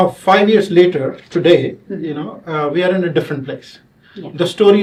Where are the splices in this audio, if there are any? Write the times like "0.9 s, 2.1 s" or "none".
none

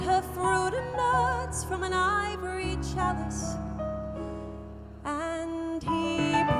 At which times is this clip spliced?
none

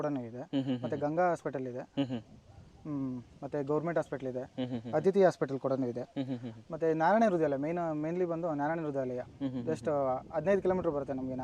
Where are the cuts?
none

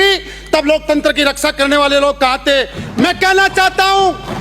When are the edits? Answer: 2.9 s

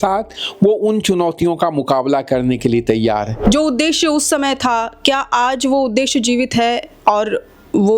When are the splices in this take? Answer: 3.3 s

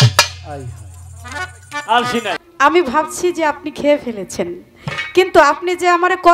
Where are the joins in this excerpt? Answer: 2.4 s

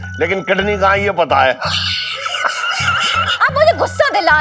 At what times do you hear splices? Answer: 3.3 s

